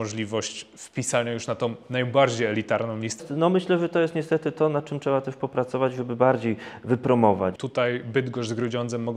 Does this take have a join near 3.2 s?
yes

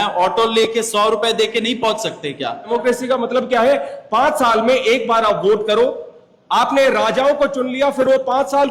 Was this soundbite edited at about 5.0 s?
no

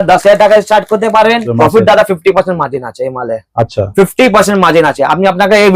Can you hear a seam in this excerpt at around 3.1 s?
no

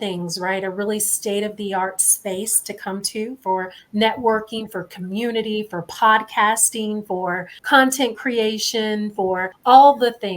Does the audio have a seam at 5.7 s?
no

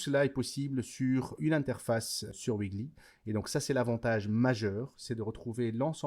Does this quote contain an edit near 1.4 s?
yes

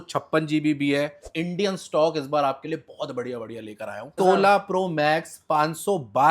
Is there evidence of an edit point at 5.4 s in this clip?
no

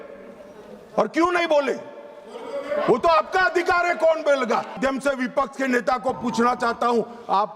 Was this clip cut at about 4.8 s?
yes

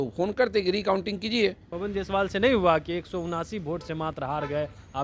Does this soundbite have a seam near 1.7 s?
yes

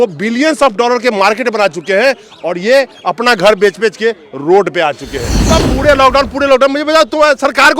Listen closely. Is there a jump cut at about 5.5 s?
yes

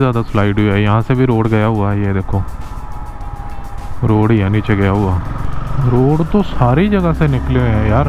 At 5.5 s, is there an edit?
yes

